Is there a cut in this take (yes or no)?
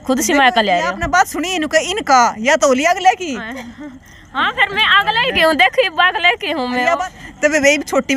yes